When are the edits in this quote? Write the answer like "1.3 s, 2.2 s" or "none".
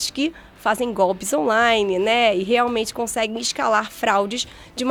none